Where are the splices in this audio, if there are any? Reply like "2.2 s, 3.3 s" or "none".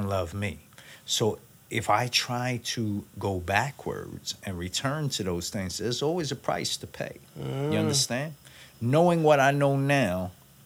none